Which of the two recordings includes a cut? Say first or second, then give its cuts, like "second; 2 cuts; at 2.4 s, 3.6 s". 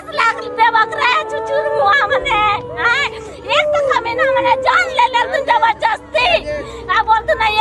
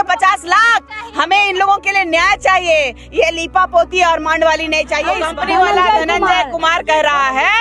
second; 1 cut; at 5.2 s